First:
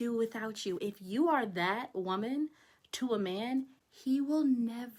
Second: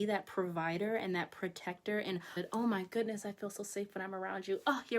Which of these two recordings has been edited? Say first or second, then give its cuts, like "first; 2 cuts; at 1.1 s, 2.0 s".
second; 1 cut; at 2.4 s